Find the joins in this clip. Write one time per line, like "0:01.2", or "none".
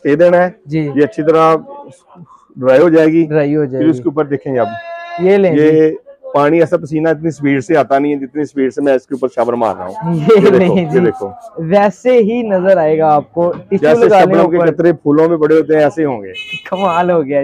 none